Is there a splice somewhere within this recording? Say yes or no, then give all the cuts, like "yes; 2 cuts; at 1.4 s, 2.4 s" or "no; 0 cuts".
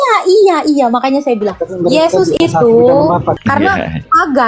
yes; 1 cut; at 3.4 s